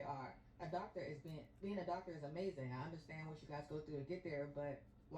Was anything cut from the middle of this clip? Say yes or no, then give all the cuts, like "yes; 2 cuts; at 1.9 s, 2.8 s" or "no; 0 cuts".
yes; 1 cut; at 1.9 s